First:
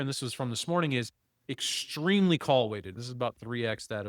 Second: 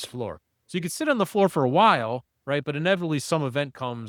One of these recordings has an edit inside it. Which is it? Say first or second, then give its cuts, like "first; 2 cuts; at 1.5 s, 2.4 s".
first; 1 cut; at 2.9 s